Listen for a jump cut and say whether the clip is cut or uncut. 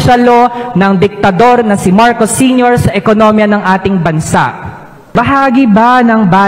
cut